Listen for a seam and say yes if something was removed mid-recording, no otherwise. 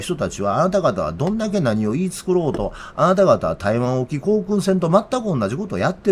no